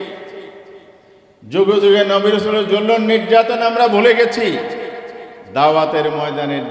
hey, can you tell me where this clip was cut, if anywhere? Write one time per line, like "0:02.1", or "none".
none